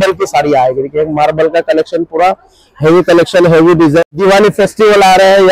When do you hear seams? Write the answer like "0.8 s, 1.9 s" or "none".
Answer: 4.0 s